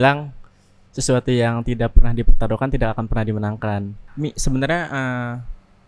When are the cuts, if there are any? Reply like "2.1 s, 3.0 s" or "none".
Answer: 4.1 s